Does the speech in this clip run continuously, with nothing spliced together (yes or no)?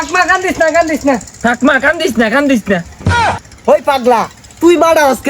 no